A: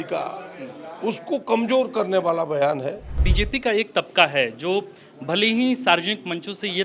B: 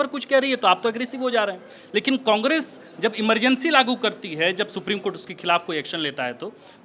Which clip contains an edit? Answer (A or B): A